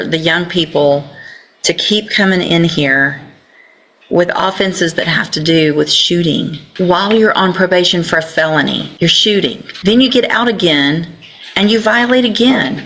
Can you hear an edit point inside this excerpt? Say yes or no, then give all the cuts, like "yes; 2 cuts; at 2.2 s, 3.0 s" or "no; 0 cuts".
yes; 3 cuts; at 6.6 s, 8.9 s, 9.7 s